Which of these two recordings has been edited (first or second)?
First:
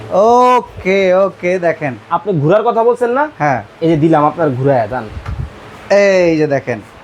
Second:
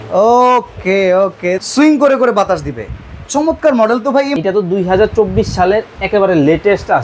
second